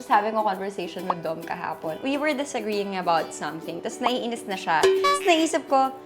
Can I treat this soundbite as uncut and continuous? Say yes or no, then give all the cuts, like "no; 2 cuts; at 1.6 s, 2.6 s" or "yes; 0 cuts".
no; 1 cut; at 2.0 s